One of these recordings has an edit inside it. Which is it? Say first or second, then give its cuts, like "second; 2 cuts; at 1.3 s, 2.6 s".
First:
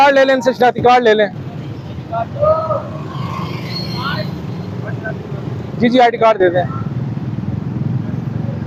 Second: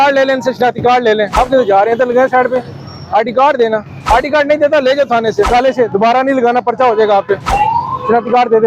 second; 4 cuts; at 1.4 s, 3.9 s, 5.5 s, 7.5 s